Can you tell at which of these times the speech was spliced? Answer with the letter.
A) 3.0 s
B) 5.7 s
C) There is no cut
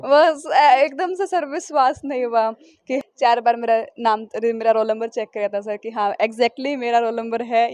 A